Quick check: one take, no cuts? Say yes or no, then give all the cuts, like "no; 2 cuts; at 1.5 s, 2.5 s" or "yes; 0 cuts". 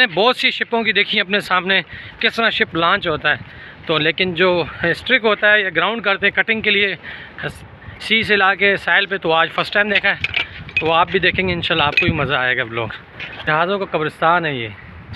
no; 1 cut; at 13.4 s